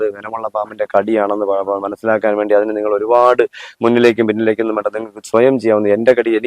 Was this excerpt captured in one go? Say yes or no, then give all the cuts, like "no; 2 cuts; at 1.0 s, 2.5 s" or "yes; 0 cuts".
yes; 0 cuts